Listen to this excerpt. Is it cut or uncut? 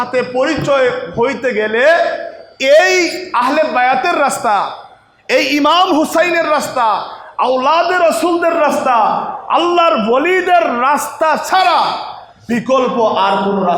uncut